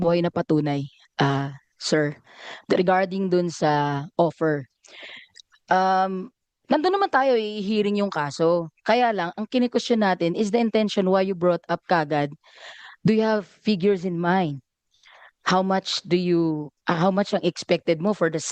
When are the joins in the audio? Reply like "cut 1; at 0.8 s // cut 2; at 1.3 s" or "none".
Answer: none